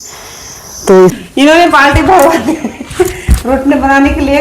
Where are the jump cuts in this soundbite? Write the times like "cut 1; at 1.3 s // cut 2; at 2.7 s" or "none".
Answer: cut 1; at 1.2 s